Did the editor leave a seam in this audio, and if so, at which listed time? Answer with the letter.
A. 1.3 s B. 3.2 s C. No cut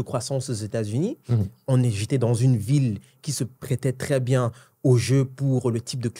B